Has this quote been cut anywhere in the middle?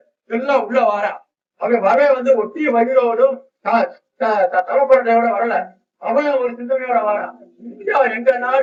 no; 0 cuts

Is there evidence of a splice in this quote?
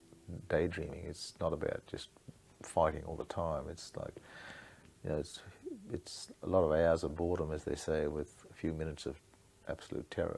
no; 0 cuts

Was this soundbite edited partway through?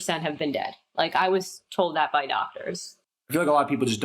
yes; 1 cut; at 2.9 s

